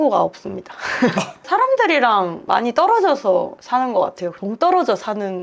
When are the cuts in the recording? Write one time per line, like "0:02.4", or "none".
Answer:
0:01.4
0:03.6